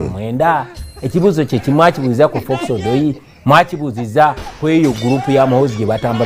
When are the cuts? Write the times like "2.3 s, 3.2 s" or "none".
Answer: none